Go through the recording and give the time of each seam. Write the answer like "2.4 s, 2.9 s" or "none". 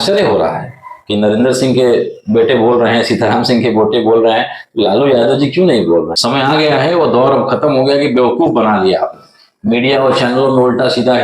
6.1 s